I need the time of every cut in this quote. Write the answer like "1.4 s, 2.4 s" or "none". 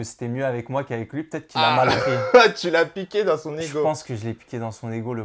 none